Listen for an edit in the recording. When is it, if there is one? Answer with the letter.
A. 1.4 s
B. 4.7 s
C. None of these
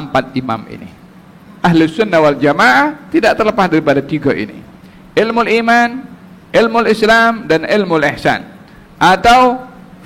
A